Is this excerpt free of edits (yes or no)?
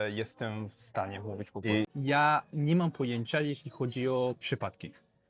no